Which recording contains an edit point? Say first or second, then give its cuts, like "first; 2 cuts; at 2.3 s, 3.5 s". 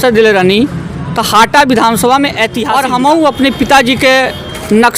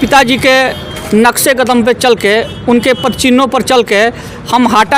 first; 1 cut; at 2.6 s